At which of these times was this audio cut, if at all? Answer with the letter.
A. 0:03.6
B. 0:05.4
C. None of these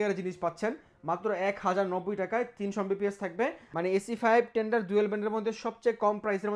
A